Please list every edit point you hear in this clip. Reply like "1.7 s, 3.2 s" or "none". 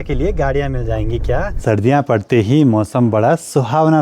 1.6 s